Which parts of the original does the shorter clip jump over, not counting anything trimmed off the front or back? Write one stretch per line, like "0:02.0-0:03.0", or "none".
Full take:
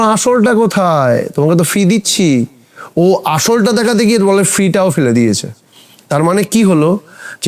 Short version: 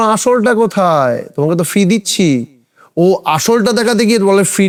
none

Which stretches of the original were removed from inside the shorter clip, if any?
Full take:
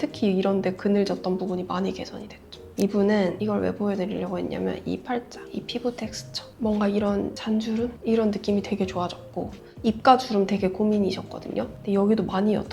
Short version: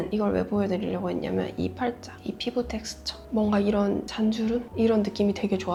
none

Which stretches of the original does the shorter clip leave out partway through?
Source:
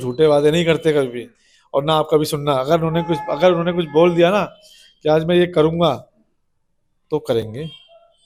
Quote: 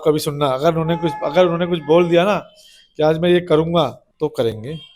0:06.1-0:07.0

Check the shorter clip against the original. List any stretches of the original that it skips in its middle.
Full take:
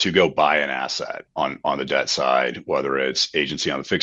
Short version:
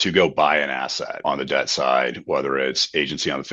0:01.2-0:01.6

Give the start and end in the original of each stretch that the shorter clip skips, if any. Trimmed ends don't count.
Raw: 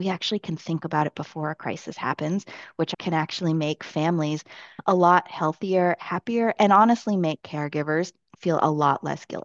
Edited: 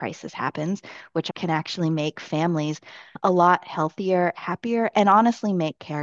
none

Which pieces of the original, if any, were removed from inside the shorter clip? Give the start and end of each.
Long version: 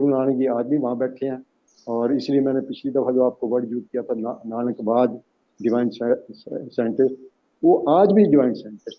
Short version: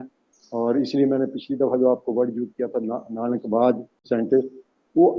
0:05.3-0:06.6

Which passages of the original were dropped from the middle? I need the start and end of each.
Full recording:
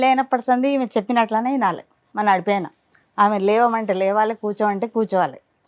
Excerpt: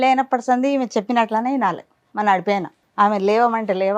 0:02.8-0:03.0

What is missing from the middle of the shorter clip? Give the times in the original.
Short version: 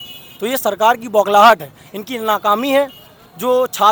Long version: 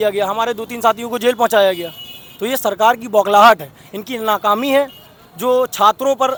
none

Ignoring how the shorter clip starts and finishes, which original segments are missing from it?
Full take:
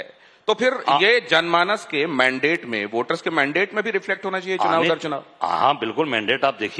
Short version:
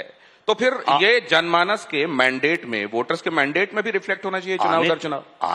none

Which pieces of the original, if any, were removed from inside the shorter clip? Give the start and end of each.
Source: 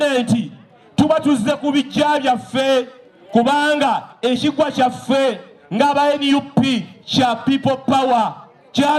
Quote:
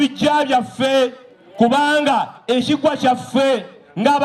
none

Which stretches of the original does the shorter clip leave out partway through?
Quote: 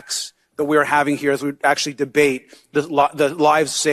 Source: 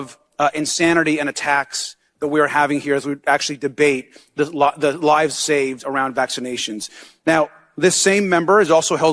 none

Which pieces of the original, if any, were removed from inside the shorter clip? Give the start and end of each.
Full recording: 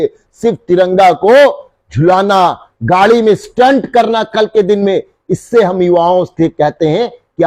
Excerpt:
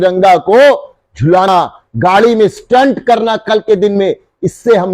0:02.2-0:02.3

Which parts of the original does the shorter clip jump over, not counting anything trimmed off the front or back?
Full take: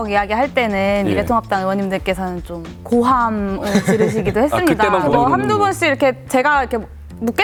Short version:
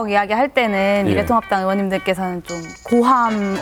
none

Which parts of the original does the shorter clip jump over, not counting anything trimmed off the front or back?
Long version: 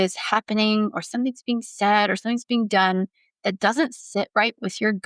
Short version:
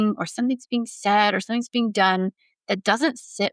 none

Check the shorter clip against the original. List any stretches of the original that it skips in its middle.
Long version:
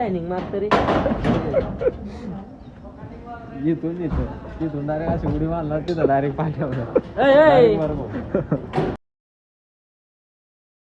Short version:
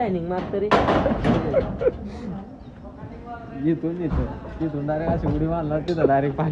none

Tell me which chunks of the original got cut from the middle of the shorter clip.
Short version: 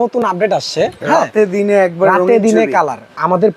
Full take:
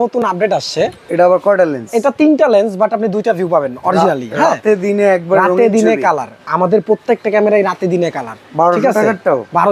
0:01.0-0:04.3

